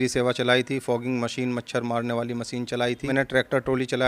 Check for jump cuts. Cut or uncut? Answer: cut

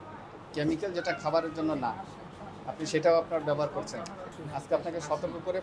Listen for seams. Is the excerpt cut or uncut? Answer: cut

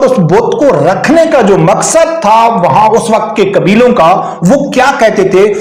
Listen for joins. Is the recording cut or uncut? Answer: uncut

